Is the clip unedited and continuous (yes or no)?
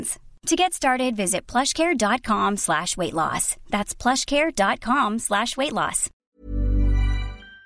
no